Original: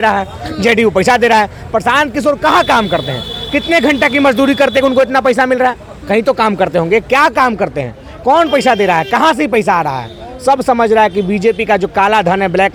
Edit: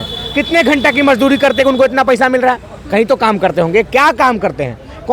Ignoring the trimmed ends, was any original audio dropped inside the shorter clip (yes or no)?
no